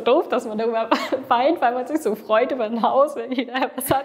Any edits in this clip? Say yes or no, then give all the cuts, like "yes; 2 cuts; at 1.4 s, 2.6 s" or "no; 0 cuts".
no; 0 cuts